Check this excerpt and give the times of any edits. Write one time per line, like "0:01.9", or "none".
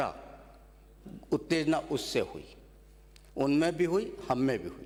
none